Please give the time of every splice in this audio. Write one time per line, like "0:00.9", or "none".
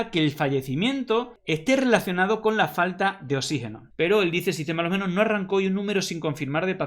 0:03.9